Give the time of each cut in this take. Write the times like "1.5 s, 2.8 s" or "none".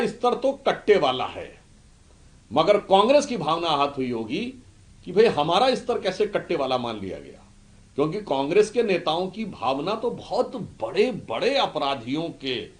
none